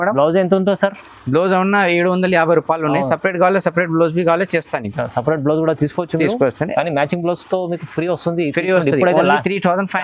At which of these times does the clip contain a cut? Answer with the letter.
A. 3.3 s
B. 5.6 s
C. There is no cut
C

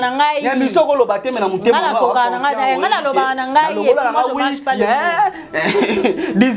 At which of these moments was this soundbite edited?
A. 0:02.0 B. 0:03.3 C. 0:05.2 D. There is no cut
D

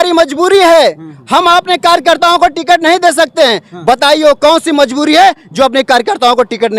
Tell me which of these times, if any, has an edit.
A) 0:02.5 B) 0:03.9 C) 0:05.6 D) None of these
D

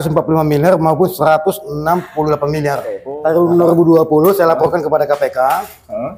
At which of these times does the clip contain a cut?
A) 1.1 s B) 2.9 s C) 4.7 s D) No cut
B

